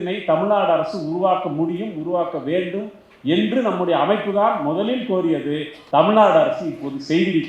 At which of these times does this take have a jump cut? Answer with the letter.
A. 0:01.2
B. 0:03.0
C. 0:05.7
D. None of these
C